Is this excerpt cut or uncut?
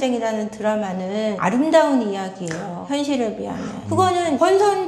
uncut